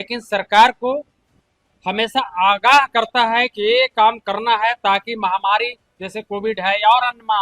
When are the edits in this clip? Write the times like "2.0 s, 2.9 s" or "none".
none